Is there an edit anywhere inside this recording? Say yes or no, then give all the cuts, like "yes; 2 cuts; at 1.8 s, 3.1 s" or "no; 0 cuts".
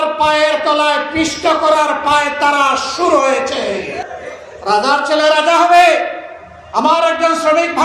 yes; 1 cut; at 4.0 s